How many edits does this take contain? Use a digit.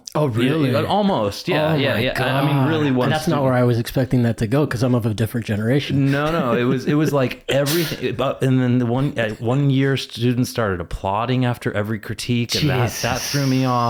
0